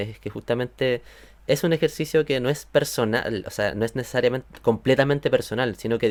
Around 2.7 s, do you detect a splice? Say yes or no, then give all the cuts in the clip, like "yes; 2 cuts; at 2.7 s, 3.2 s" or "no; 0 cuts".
no; 0 cuts